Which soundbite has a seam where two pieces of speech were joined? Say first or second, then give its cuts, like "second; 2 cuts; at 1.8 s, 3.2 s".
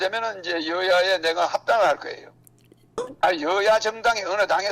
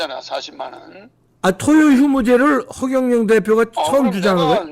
first; 1 cut; at 3.0 s